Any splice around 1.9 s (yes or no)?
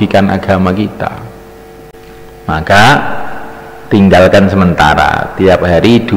yes